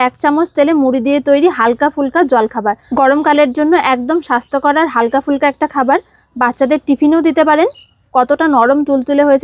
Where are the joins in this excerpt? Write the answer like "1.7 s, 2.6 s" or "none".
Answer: 2.8 s, 8.0 s